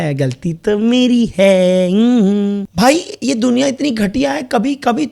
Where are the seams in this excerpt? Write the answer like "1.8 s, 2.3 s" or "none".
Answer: 2.7 s